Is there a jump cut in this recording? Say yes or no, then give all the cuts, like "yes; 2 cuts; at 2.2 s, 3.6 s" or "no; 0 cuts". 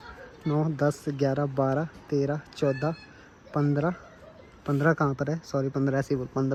no; 0 cuts